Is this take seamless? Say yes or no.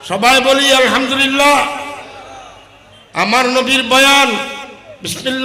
yes